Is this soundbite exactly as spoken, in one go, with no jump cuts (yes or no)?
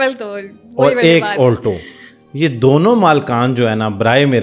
yes